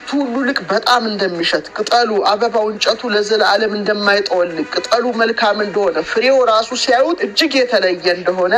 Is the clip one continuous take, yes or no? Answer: no